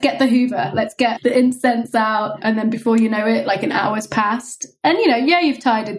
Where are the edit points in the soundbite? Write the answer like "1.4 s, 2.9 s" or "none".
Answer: 1.1 s, 2.4 s